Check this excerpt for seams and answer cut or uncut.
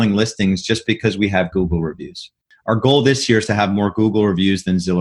cut